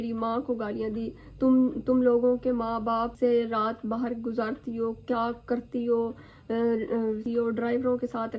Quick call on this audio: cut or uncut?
cut